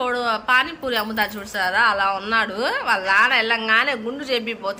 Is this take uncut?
yes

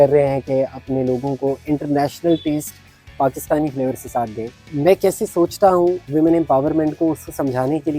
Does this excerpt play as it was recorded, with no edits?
yes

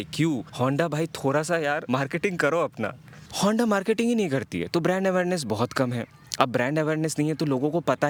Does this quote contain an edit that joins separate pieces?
no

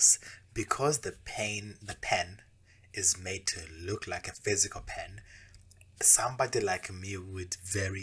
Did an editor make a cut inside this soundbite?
no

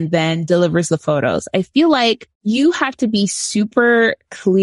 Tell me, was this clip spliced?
yes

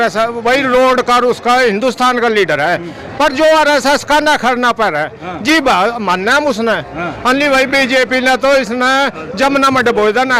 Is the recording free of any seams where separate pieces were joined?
yes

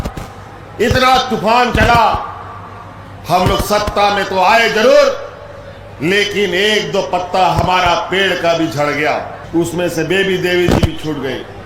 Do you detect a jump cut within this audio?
yes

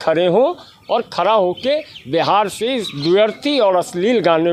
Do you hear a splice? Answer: no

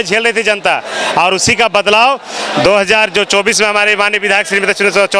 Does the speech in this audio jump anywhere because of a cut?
no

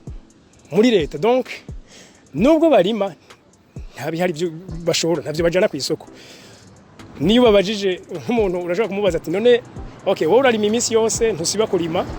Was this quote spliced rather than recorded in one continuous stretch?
no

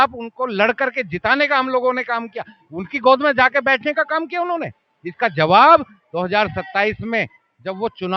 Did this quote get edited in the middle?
no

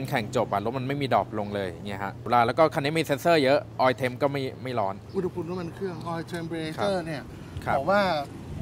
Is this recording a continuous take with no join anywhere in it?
no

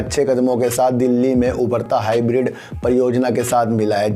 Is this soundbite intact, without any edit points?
yes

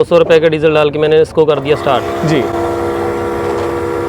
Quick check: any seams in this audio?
no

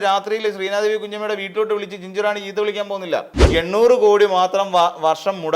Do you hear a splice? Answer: yes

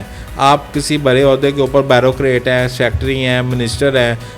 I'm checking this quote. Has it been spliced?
no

